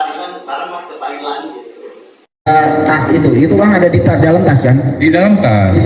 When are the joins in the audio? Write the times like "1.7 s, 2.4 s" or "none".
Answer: 2.5 s